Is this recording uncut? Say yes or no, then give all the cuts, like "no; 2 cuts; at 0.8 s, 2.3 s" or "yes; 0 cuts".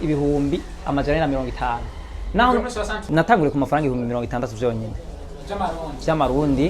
no; 1 cut; at 3.0 s